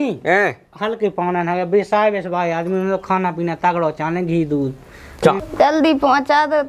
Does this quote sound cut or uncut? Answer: cut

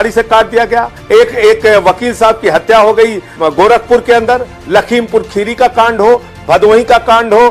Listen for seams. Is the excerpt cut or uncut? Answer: cut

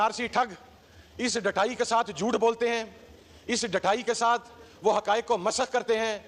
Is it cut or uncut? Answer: uncut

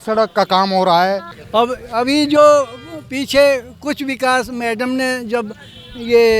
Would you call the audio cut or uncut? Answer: cut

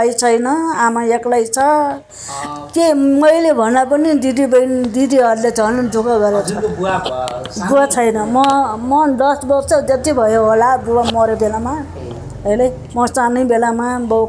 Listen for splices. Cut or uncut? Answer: uncut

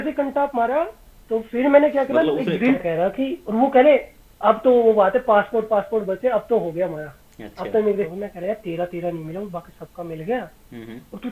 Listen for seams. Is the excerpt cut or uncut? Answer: cut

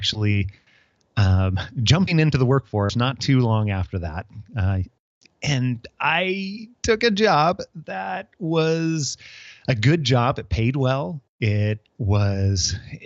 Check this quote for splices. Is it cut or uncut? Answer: uncut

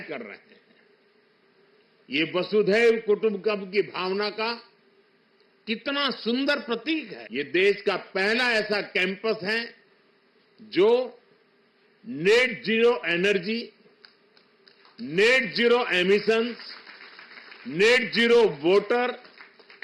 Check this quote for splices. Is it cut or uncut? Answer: cut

